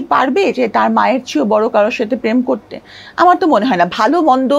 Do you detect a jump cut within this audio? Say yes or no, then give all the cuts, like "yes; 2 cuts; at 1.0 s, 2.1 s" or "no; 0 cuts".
no; 0 cuts